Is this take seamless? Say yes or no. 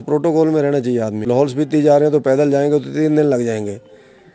no